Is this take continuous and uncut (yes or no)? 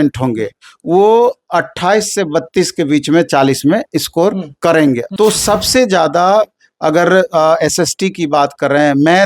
no